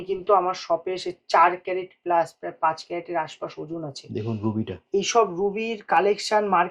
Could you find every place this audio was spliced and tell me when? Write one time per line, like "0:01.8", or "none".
none